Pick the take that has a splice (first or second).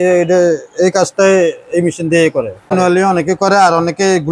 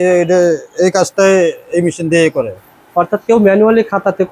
first